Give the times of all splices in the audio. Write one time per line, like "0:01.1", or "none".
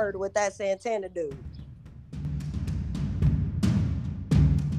0:01.4